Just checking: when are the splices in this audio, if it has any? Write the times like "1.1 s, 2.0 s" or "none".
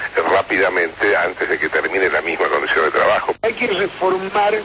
3.4 s